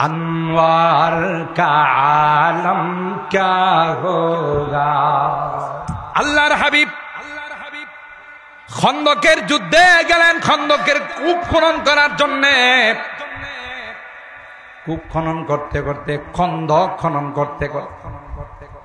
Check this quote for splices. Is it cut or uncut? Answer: cut